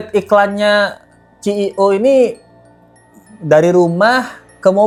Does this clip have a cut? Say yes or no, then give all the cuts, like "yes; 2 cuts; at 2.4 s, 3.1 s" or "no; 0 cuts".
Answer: no; 0 cuts